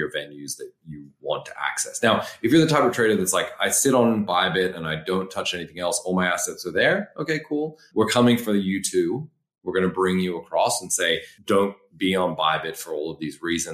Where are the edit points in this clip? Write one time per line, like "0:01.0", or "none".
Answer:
0:07.8
0:11.3